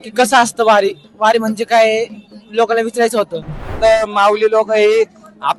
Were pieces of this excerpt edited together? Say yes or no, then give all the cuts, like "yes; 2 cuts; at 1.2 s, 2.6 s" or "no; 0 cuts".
yes; 1 cut; at 3.7 s